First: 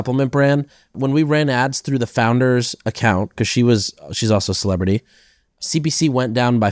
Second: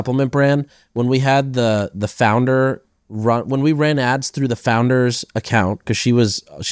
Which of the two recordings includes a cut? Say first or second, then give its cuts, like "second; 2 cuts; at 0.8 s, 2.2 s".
first; 2 cuts; at 0.9 s, 5.6 s